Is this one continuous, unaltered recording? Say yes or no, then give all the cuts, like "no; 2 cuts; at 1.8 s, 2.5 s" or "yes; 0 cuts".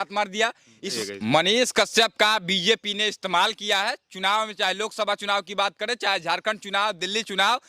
no; 1 cut; at 0.9 s